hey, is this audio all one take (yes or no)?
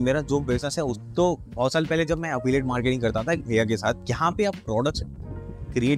no